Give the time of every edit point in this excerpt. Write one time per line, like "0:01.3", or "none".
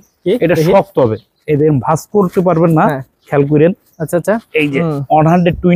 0:04.8